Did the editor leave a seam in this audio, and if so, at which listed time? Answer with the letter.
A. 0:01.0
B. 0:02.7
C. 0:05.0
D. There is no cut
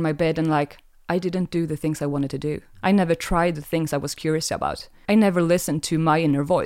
C